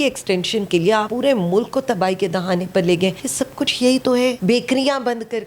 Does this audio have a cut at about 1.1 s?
yes; 3 cuts; at 1.1 s, 3.2 s, 4.4 s

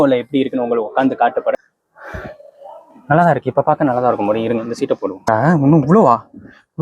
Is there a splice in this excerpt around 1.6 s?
yes; 2 cuts; at 1.6 s, 5.3 s

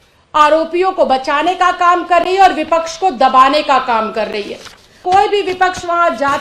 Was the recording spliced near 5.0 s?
yes; 1 cut; at 5.0 s

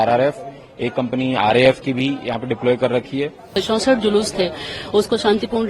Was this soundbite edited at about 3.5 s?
yes; 1 cut; at 3.5 s

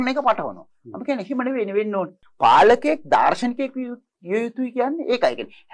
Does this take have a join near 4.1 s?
no; 1 cut; at 2.2 s

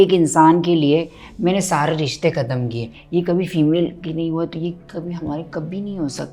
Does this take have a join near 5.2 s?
no; 1 cut; at 2.9 s

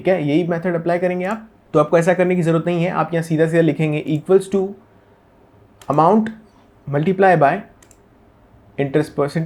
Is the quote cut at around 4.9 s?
no; 0 cuts

